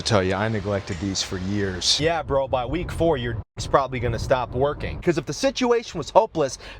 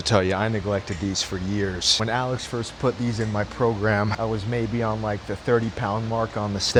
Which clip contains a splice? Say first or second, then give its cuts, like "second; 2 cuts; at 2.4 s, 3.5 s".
first; 2 cuts; at 1.9 s, 5.0 s